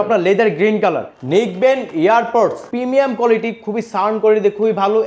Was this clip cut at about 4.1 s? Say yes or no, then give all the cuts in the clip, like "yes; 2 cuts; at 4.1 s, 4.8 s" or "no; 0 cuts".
no; 2 cuts; at 1.1 s, 2.7 s